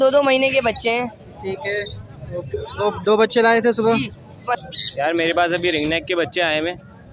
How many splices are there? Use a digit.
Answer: 1